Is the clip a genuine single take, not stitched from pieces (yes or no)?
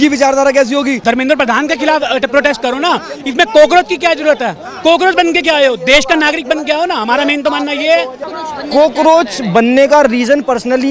no